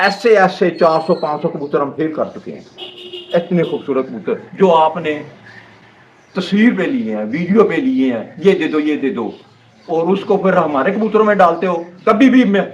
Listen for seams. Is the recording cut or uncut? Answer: uncut